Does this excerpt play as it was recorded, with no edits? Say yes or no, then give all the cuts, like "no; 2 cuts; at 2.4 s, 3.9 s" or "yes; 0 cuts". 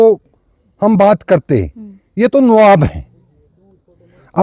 yes; 0 cuts